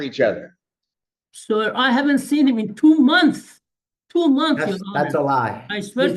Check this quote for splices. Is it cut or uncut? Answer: uncut